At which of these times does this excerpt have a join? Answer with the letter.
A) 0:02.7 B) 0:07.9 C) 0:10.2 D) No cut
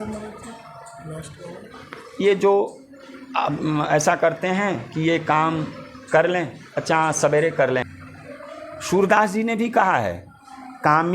B